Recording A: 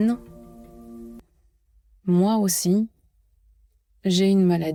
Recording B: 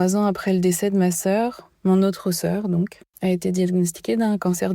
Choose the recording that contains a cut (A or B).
B